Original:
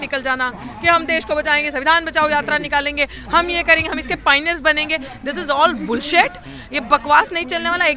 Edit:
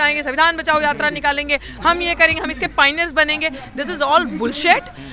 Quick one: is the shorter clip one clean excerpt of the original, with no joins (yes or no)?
yes